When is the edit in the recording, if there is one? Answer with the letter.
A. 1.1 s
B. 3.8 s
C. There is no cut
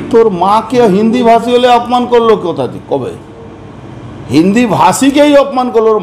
C